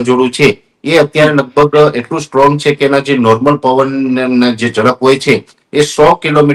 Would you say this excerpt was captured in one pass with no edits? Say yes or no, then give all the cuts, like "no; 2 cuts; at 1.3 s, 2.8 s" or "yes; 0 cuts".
yes; 0 cuts